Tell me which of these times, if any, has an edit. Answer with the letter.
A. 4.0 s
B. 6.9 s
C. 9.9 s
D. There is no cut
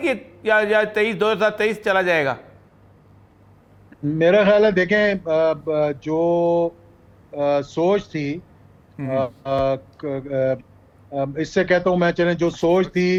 D